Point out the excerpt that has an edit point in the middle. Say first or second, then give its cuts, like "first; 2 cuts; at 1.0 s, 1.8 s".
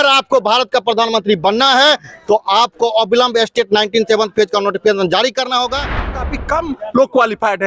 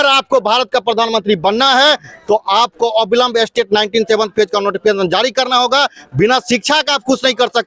first; 1 cut; at 6.2 s